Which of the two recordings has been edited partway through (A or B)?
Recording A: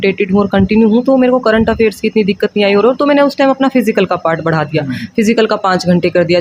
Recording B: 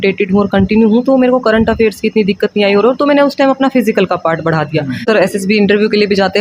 B